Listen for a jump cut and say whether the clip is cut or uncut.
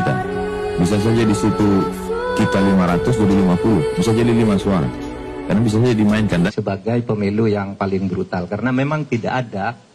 cut